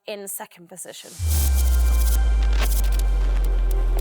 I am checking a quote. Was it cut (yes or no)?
yes